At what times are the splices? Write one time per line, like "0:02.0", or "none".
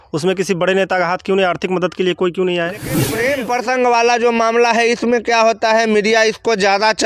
0:03.0